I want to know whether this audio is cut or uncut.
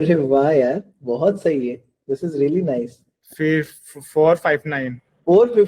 uncut